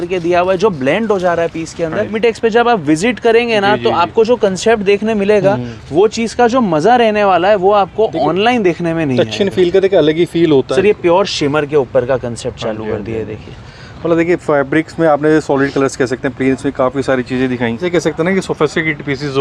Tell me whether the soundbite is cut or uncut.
cut